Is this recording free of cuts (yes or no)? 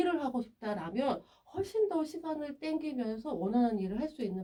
yes